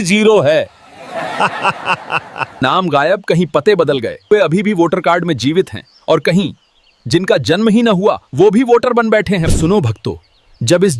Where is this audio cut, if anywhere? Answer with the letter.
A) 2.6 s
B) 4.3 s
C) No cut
B